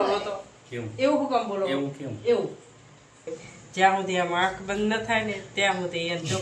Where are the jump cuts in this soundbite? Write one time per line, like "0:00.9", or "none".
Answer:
0:03.3